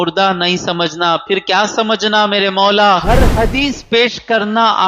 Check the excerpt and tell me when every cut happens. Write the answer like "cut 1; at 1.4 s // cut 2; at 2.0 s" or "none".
cut 1; at 3.2 s